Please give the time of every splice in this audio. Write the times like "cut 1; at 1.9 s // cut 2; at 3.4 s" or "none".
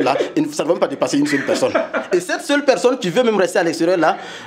none